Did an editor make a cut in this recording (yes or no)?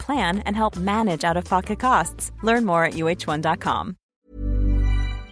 yes